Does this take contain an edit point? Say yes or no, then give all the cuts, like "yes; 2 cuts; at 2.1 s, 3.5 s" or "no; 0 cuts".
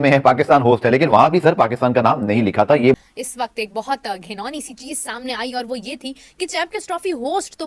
yes; 1 cut; at 2.9 s